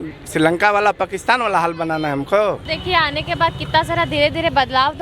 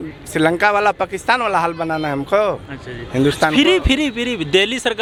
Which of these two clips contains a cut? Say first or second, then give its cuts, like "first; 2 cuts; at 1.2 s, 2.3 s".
first; 1 cut; at 2.7 s